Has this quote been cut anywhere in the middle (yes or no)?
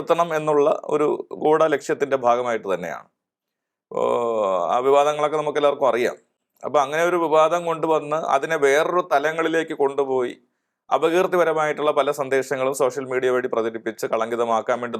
no